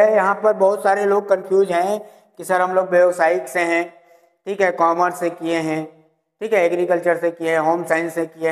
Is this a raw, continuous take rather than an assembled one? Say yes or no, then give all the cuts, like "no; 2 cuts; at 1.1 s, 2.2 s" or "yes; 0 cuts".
yes; 0 cuts